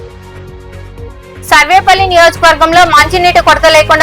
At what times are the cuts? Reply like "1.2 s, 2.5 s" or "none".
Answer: 1.1 s